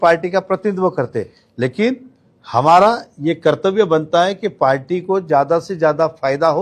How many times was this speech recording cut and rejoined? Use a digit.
0